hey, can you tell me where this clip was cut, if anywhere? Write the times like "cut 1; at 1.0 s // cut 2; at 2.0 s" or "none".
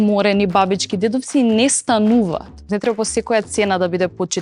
cut 1; at 2.6 s